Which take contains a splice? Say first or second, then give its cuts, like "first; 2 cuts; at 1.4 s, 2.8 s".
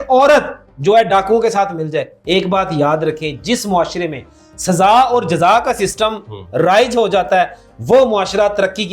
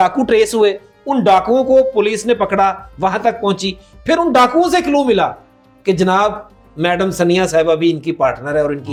first; 1 cut; at 2.1 s